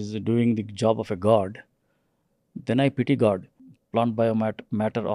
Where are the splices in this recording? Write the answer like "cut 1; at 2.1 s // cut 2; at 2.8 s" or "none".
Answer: cut 1; at 3.5 s